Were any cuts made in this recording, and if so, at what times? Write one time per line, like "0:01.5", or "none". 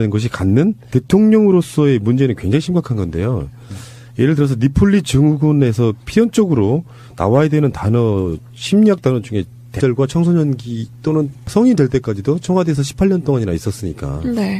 none